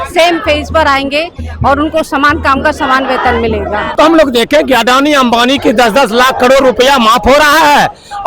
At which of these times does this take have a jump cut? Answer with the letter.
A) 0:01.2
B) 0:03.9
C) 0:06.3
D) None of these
B